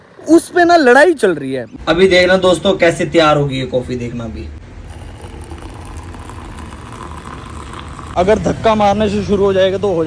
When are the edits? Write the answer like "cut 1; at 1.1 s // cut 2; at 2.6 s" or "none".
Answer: cut 1; at 1.7 s // cut 2; at 4.6 s // cut 3; at 8.0 s